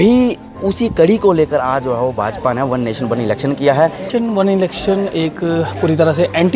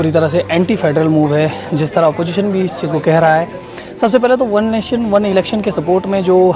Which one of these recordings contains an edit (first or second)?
first